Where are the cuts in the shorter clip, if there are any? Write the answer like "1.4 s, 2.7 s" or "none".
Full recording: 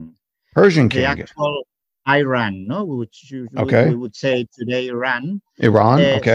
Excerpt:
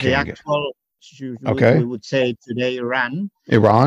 1.0 s